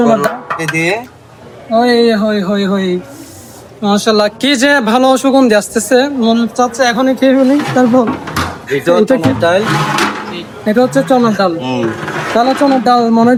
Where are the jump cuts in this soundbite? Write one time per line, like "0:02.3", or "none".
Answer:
none